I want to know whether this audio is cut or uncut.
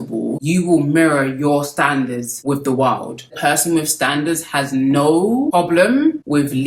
cut